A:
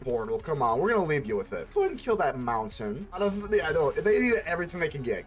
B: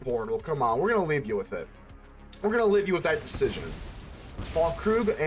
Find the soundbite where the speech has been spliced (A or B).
A